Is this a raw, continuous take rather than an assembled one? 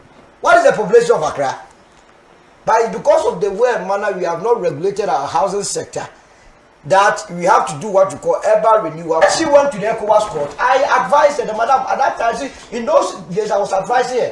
no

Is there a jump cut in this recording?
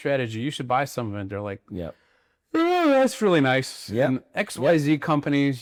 no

